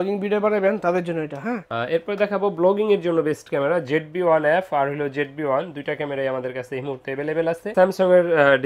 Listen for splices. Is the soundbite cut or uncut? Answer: cut